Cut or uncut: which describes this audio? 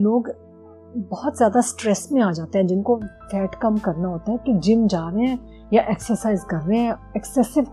uncut